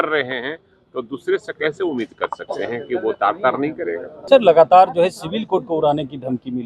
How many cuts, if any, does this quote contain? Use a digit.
1